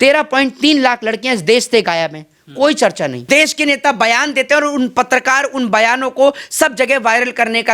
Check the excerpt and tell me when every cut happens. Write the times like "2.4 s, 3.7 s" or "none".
3.2 s